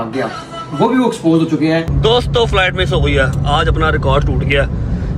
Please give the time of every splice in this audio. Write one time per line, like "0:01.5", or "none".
0:01.9